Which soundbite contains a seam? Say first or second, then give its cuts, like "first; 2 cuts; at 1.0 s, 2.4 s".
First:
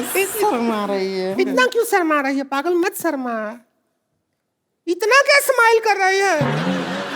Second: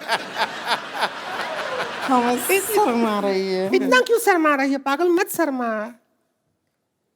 second; 1 cut; at 1.4 s